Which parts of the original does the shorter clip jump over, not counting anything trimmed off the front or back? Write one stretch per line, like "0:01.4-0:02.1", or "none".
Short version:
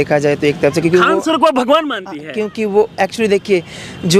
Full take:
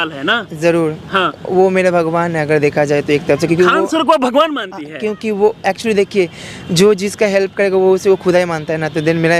none